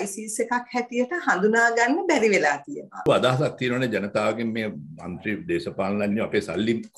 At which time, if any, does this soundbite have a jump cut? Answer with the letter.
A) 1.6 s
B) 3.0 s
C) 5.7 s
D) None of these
B